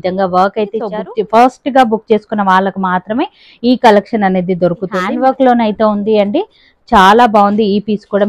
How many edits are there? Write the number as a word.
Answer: two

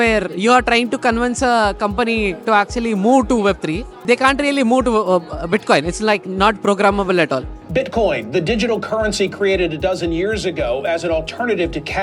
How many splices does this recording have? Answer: one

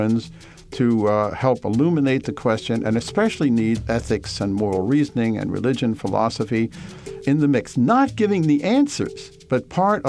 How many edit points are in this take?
two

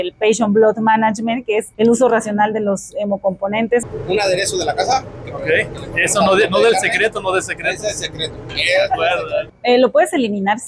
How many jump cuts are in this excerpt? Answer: three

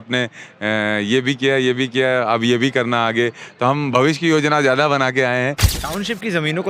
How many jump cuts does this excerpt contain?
one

